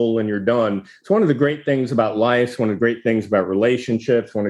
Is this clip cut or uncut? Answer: uncut